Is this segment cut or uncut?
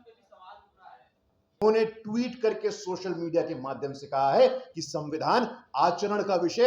cut